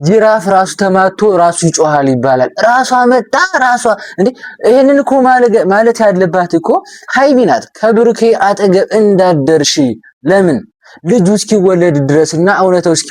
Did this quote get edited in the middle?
no; 0 cuts

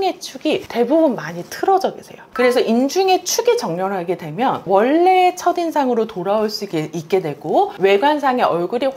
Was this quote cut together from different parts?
no; 0 cuts

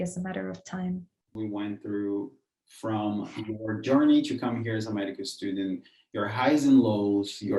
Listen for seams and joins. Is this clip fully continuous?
no; 1 cut; at 1.3 s

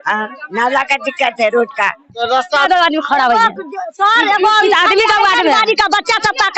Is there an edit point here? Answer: yes; 1 cut; at 2.6 s

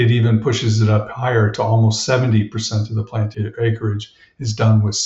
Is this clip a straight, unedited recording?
no; 1 cut; at 3.3 s

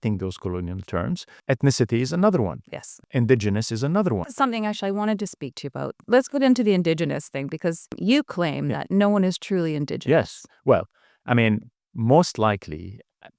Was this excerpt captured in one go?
no; 5 cuts; at 1.3 s, 3.0 s, 4.3 s, 6.0 s, 8.0 s

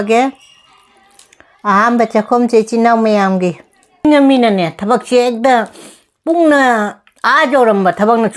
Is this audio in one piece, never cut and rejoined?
no; 1 cut; at 4.0 s

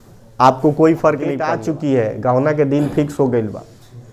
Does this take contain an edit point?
yes; 1 cut; at 1.5 s

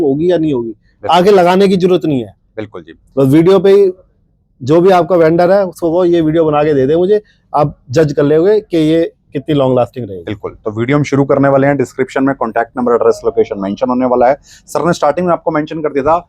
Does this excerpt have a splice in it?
no; 0 cuts

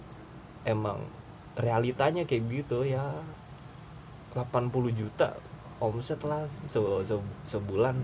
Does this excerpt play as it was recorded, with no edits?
yes; 0 cuts

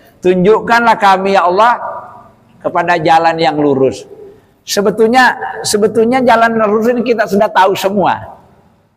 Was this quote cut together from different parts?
no; 0 cuts

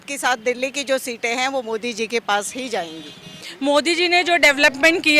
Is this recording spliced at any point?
yes; 1 cut; at 3.4 s

